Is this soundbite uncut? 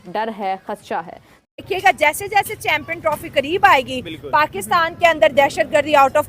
no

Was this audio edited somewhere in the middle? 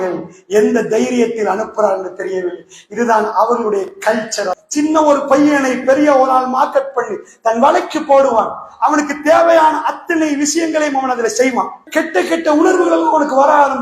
yes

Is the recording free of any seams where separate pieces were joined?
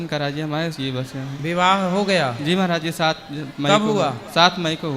yes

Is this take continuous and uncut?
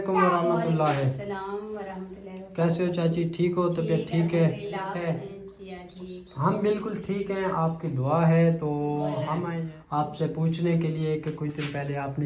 no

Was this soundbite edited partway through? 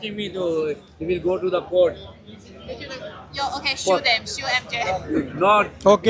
no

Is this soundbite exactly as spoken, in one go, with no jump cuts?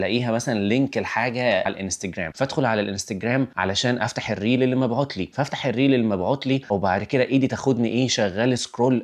no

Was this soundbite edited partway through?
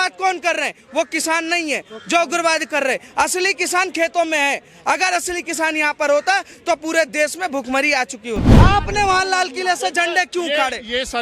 yes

